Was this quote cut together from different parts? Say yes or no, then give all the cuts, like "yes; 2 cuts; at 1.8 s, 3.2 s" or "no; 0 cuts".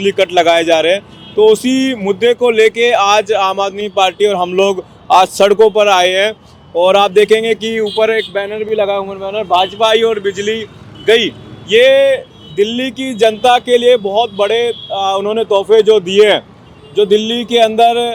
no; 0 cuts